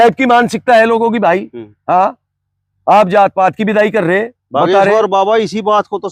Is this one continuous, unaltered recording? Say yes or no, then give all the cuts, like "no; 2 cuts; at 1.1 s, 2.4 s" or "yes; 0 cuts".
yes; 0 cuts